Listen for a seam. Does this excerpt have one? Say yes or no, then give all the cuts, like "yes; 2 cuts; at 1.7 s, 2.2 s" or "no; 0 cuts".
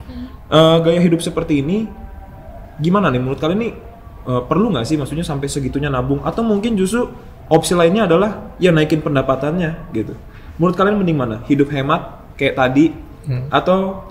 no; 0 cuts